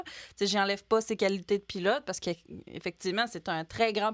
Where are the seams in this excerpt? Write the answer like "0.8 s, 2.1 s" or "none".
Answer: none